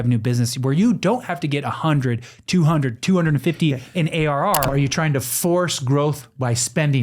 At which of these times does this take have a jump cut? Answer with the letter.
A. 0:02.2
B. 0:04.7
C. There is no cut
B